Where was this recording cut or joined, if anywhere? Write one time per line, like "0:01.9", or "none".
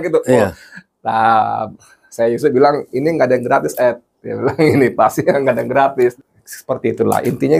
0:06.1